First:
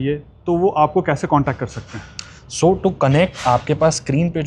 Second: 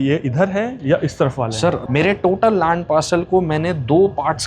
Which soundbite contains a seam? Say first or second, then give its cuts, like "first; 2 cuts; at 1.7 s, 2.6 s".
second; 1 cut; at 1.8 s